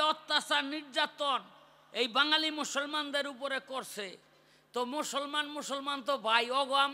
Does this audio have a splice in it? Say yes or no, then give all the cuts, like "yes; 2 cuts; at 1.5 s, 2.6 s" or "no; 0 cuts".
no; 0 cuts